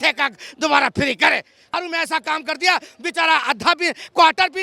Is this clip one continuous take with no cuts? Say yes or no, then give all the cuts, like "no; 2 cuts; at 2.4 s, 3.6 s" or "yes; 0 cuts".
no; 1 cut; at 1.6 s